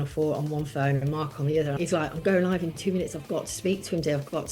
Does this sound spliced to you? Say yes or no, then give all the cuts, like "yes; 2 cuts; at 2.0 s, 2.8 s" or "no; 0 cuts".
yes; 1 cut; at 1.7 s